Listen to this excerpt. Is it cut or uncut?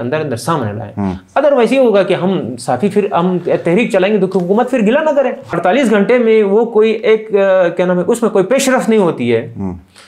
cut